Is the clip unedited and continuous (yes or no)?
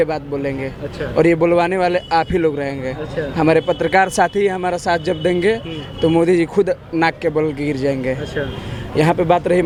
yes